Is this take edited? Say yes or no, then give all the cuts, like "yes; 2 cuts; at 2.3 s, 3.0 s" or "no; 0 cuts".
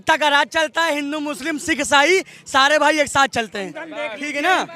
no; 0 cuts